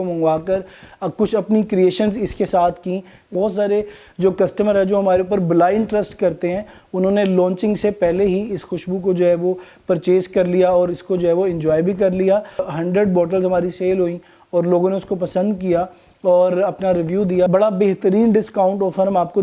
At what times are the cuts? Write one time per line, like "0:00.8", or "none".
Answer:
0:03.3
0:12.7
0:17.5